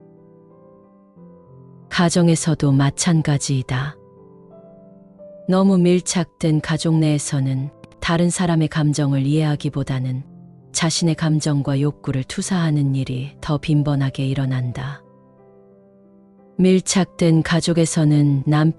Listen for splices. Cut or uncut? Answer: cut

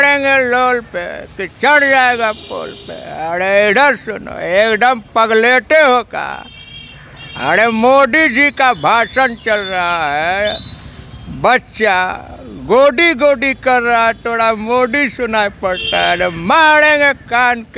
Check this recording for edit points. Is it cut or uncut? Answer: uncut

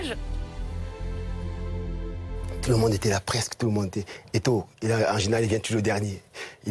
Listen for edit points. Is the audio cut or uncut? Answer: uncut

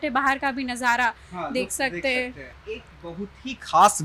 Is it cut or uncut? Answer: uncut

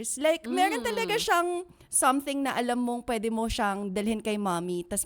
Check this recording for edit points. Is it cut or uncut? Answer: uncut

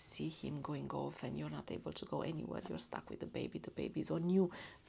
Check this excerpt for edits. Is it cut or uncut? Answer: uncut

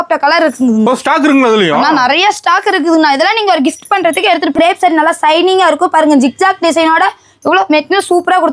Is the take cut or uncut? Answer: cut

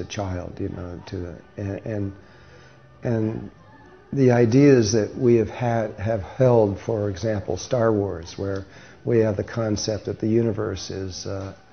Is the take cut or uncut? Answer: cut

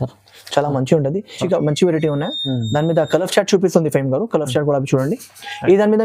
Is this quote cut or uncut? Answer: cut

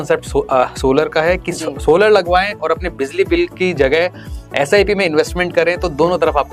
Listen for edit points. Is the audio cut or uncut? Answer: uncut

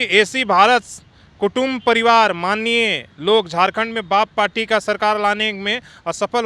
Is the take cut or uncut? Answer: uncut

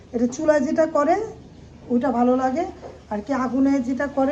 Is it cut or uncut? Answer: uncut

